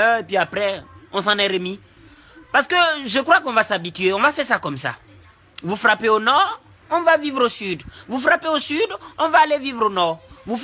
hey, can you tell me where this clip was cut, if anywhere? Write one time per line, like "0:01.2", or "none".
none